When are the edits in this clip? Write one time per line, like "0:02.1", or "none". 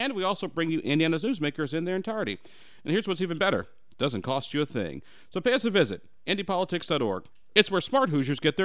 none